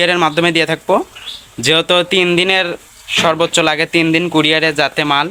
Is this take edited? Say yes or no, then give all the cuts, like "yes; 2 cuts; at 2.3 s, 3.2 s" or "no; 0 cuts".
no; 0 cuts